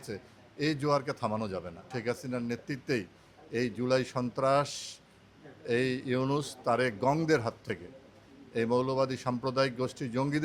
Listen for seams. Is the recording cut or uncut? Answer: cut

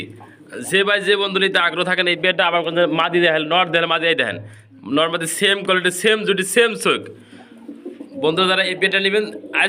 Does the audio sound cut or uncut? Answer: uncut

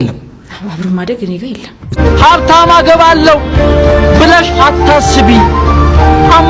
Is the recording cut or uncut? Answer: cut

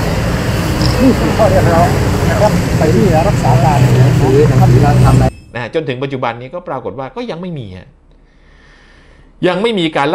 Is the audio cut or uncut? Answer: cut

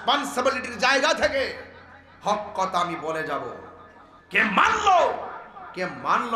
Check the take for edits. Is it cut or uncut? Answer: uncut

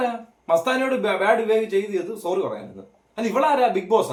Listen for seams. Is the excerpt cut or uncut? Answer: uncut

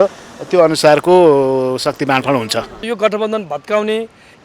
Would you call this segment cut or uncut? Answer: cut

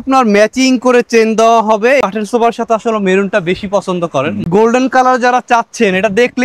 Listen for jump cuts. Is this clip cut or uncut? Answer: cut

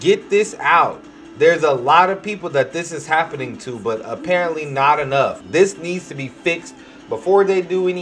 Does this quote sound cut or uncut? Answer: cut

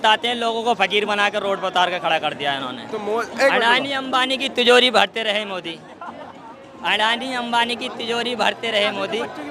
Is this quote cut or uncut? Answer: uncut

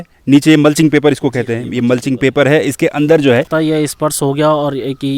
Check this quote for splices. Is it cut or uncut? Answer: cut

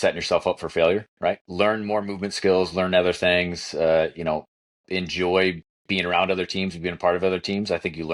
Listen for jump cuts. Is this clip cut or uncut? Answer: cut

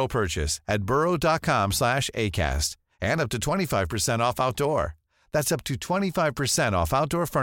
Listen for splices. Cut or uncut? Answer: uncut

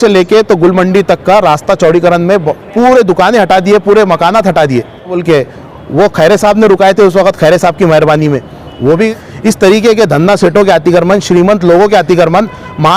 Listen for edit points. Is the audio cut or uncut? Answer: cut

